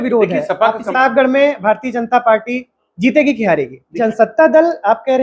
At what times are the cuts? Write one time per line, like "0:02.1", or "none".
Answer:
0:00.9
0:04.0